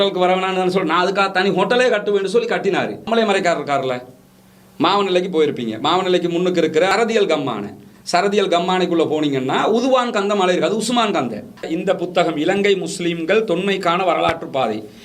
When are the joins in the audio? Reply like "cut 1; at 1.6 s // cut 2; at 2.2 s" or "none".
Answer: cut 1; at 3.1 s // cut 2; at 6.9 s // cut 3; at 11.7 s